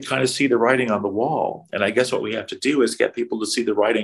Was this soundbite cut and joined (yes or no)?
no